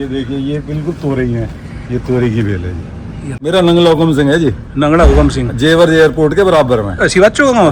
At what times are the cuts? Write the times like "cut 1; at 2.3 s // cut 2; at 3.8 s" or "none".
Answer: cut 1; at 3.3 s